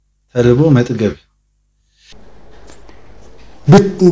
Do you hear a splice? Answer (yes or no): yes